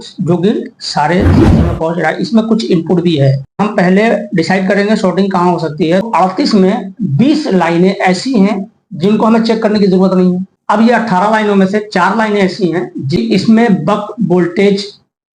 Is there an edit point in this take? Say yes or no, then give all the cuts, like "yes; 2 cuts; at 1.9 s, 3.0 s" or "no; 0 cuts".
yes; 3 cuts; at 3.6 s, 6.0 s, 10.5 s